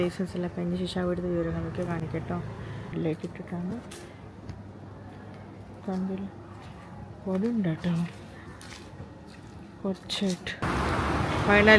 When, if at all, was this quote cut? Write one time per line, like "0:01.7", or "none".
none